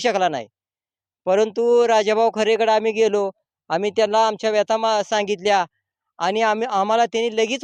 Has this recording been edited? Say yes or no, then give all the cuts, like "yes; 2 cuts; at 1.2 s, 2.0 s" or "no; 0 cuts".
no; 0 cuts